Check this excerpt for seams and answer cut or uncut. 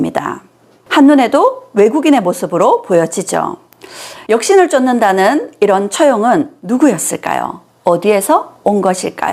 uncut